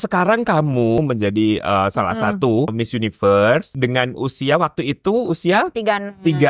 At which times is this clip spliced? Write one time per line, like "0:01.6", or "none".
0:01.0
0:02.7
0:03.7